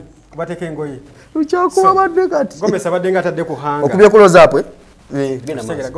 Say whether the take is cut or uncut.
uncut